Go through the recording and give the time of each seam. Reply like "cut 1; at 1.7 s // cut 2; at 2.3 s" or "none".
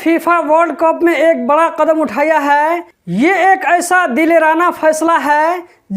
cut 1; at 2.9 s